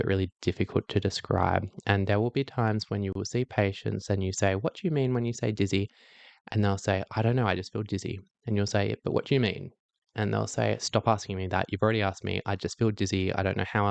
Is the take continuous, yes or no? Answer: yes